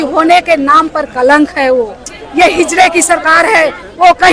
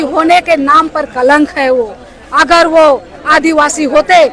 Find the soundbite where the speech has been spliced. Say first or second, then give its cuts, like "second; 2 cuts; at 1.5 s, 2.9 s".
first; 1 cut; at 2.2 s